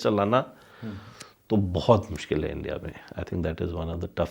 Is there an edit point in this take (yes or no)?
no